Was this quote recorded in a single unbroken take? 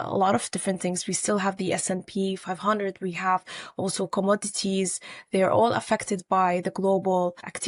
yes; 0 cuts

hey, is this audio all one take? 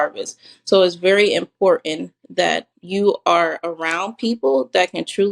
no; 1 cut; at 2.7 s

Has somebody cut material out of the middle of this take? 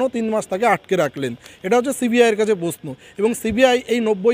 no; 0 cuts

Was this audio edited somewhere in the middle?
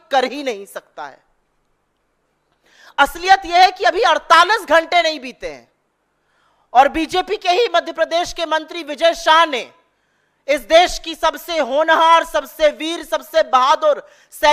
no; 0 cuts

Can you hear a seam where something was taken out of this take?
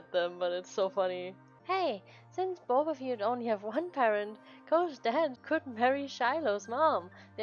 yes; 2 cuts; at 1.5 s, 5.4 s

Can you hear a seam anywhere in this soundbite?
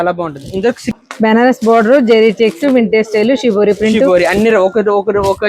yes; 1 cut; at 0.9 s

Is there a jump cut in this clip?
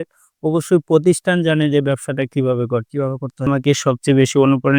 yes; 1 cut; at 3.5 s

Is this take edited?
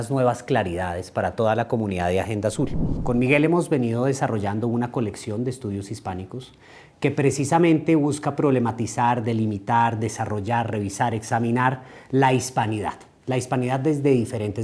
yes; 1 cut; at 2.9 s

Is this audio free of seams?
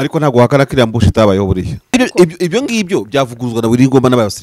no; 1 cut; at 1.9 s

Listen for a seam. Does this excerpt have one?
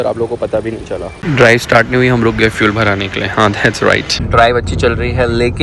no; 0 cuts

